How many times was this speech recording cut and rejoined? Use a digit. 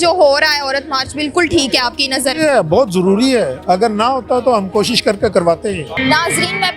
0